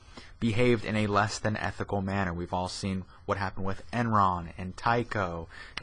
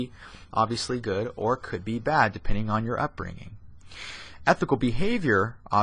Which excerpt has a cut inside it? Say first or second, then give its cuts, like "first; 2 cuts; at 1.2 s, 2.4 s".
first; 1 cut; at 0.9 s